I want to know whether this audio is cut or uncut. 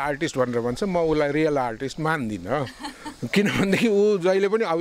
uncut